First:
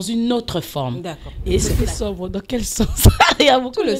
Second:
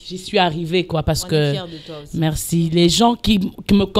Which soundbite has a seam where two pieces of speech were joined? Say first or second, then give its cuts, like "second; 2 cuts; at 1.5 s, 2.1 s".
first; 1 cut; at 1.7 s